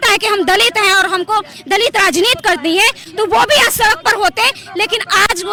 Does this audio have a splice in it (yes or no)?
no